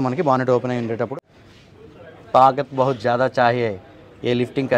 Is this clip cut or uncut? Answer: cut